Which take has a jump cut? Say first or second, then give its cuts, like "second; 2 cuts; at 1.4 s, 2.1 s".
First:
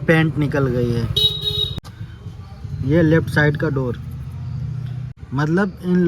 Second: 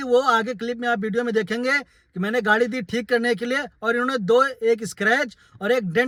first; 2 cuts; at 1.8 s, 5.1 s